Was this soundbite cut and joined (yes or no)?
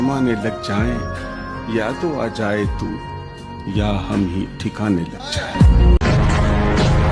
yes